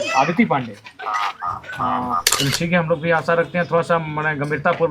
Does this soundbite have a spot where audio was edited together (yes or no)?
yes